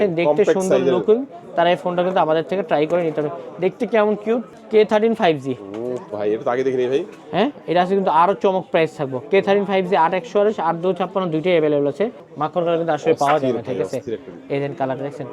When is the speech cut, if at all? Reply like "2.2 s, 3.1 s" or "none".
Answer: 4.6 s, 12.2 s

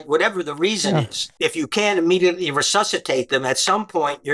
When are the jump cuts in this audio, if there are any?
1.2 s

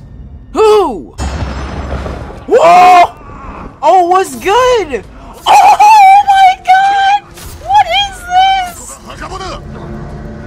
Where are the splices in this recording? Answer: 1.2 s

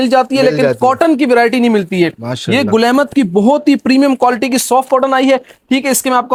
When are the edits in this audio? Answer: none

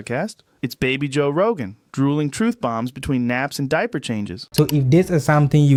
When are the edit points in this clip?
none

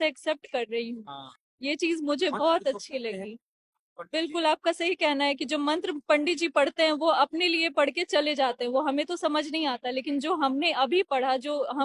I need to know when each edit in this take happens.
none

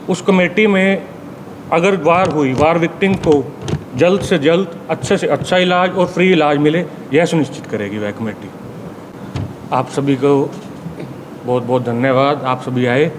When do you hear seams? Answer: 9.1 s

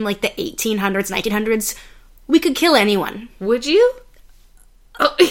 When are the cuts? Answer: none

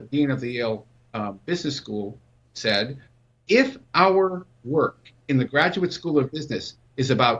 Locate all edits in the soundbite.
none

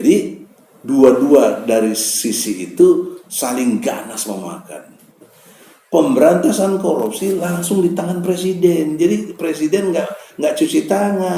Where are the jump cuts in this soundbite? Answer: 5.3 s

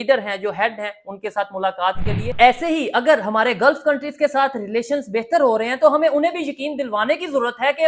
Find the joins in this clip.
2.4 s

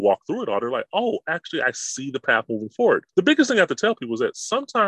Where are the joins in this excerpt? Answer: 3.1 s

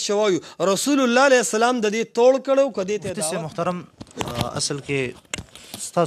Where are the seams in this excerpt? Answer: 3.2 s

